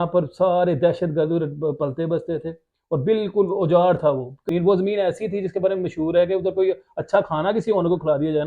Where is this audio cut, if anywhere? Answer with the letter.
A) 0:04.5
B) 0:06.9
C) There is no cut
A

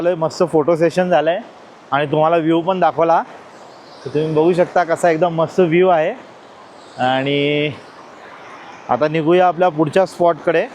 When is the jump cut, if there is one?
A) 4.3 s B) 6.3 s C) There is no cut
C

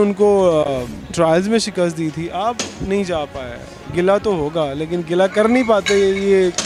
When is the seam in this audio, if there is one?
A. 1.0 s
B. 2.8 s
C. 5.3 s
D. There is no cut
D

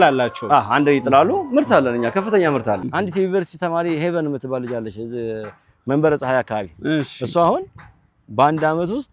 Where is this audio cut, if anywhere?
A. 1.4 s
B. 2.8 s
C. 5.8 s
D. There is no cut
B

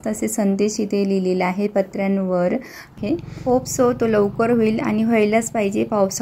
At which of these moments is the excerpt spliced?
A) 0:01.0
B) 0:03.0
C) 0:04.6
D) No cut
B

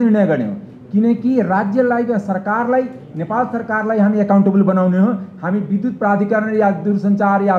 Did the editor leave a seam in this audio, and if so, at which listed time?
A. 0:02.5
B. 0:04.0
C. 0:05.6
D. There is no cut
D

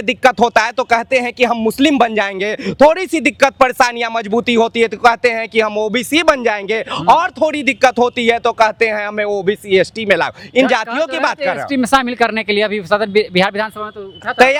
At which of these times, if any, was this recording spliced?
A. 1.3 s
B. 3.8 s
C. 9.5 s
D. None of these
D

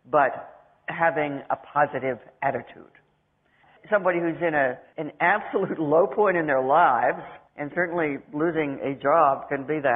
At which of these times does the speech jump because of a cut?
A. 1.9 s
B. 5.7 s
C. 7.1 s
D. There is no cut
A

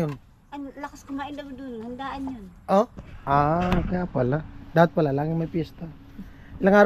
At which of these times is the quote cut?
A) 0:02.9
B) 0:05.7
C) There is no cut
C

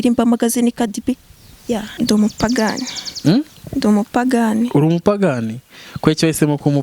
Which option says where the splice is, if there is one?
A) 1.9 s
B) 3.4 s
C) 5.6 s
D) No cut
A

